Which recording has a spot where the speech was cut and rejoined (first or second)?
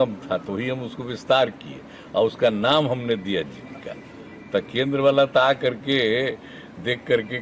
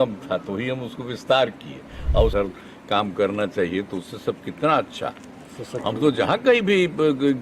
second